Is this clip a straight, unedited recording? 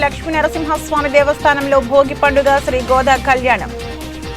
yes; 0 cuts

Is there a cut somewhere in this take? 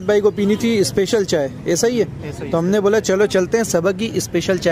no; 0 cuts

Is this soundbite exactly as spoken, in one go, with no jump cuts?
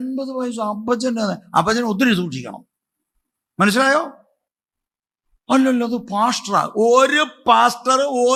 yes; 0 cuts

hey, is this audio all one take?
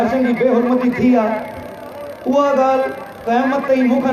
yes; 0 cuts

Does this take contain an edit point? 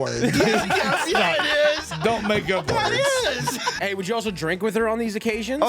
yes; 1 cut; at 3.8 s

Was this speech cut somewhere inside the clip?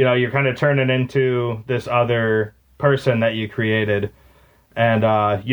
no; 0 cuts

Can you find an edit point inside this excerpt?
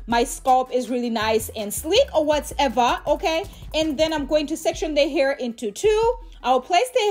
no; 0 cuts

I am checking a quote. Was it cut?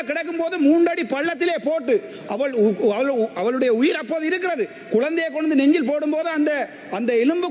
no; 0 cuts

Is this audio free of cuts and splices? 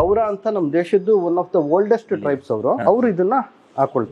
no; 1 cut; at 2.8 s

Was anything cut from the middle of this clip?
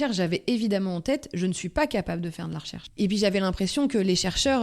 yes; 1 cut; at 3.0 s

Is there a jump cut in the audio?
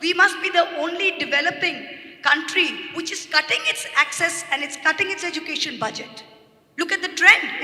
no; 0 cuts

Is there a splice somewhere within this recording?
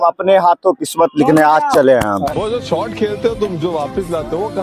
yes; 1 cut; at 2.3 s

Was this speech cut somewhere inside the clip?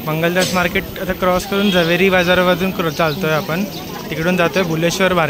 no; 0 cuts

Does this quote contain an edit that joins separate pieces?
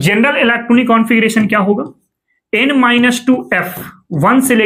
no; 0 cuts

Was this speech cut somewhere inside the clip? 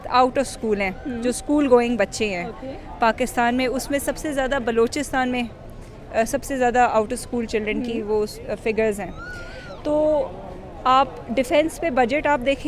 no; 0 cuts

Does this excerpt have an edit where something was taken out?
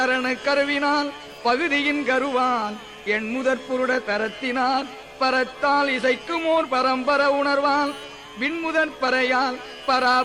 yes; 1 cut; at 6.7 s

